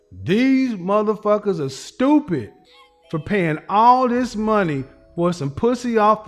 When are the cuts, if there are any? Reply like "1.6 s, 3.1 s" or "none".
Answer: none